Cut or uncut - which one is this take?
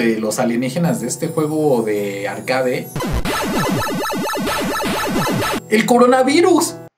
cut